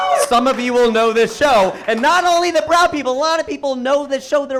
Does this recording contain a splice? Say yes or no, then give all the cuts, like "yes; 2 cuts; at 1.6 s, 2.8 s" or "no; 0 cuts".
no; 0 cuts